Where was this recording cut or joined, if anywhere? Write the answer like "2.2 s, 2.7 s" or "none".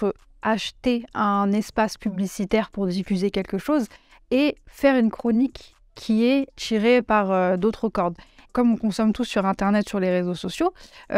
6.6 s, 8.5 s